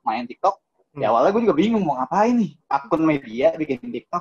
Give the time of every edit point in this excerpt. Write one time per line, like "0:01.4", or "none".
0:02.6